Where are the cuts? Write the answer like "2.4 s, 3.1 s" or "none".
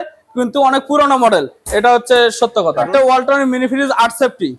2.9 s